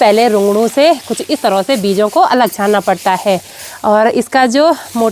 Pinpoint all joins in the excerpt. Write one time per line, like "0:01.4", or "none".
none

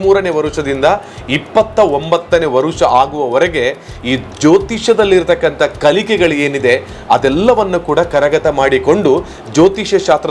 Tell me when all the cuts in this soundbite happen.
none

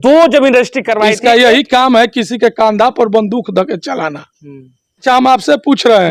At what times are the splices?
0:01.1
0:05.0

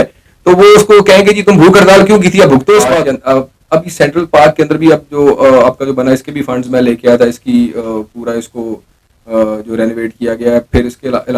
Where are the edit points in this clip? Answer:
0:03.1

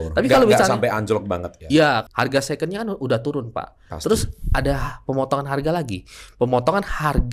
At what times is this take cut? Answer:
0:02.0

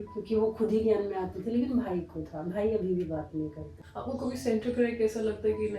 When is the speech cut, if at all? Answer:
0:03.7

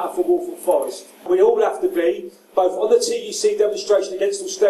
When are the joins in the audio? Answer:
0:01.2

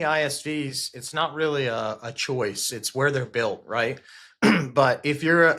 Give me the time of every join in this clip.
none

